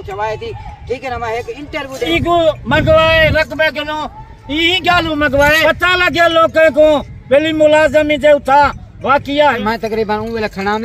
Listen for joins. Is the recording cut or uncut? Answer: cut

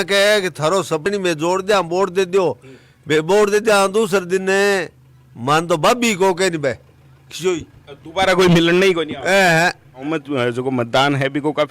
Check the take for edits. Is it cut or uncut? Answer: cut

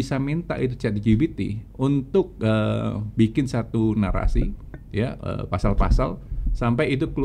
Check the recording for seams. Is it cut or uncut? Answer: uncut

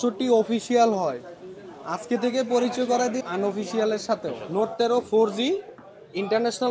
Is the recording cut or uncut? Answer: cut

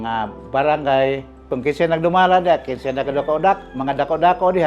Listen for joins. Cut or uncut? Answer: cut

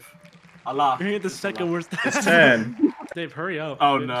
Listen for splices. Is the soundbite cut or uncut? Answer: uncut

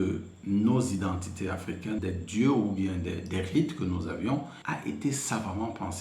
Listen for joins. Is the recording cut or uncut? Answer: cut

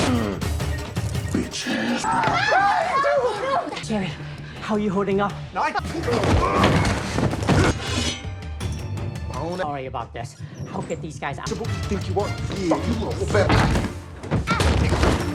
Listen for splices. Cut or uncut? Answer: uncut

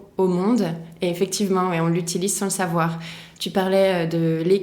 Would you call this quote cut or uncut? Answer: uncut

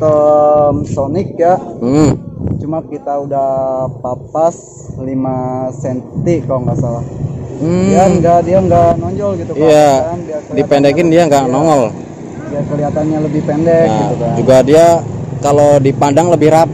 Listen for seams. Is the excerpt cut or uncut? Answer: uncut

